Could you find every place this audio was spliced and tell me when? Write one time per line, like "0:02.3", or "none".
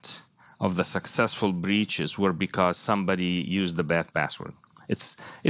none